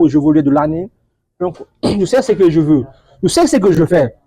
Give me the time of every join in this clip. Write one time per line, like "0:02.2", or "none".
none